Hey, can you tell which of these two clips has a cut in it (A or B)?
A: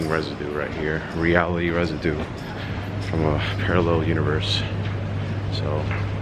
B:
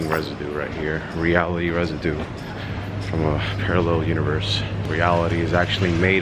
B